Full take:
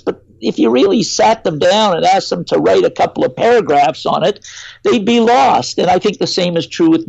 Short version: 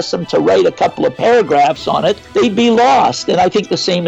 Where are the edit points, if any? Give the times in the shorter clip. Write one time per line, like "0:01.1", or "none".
0:02.2